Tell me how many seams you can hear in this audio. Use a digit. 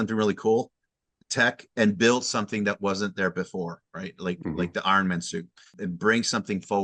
1